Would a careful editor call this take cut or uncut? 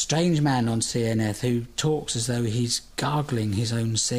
uncut